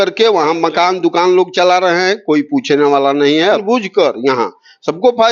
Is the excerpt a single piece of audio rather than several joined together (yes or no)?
no